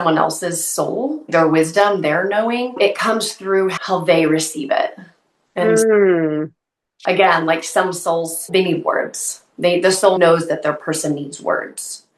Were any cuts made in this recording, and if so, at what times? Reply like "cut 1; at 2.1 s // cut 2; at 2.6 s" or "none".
cut 1; at 1.3 s // cut 2; at 2.8 s // cut 3; at 3.8 s // cut 4; at 8.5 s // cut 5; at 10.2 s